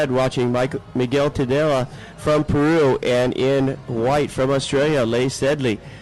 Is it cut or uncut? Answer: uncut